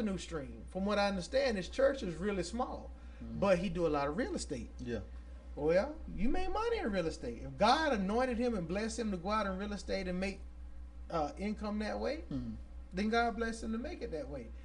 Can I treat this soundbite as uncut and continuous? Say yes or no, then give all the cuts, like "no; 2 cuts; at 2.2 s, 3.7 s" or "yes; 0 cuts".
yes; 0 cuts